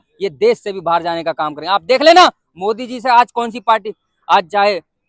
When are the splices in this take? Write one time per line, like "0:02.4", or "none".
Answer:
none